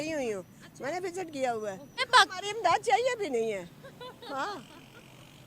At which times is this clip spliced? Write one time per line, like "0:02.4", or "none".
0:02.0